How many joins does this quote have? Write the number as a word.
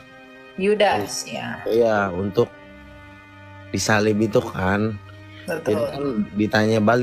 zero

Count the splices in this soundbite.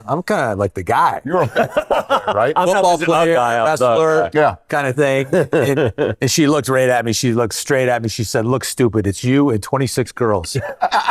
zero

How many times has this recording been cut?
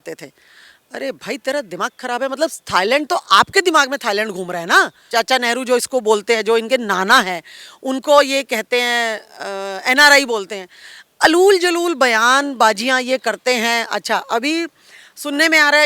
one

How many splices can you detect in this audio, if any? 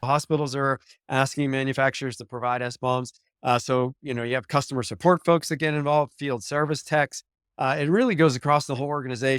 zero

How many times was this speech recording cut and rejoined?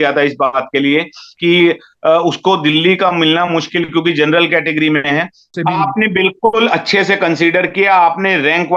two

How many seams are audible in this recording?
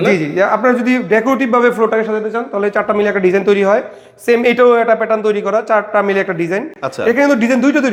zero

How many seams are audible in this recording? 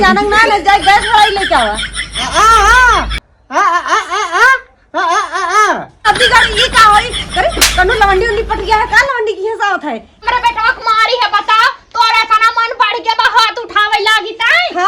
two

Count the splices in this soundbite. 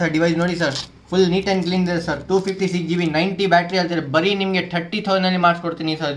zero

